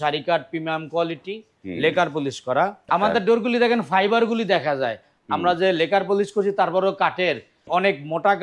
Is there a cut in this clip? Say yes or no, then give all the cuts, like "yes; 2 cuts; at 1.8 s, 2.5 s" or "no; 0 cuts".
yes; 2 cuts; at 2.9 s, 7.5 s